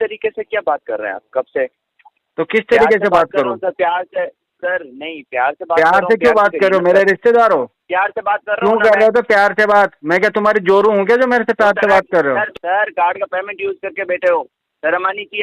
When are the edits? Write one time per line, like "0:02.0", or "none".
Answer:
0:07.8
0:12.5